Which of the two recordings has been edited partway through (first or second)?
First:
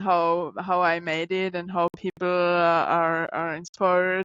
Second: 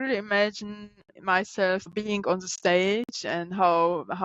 second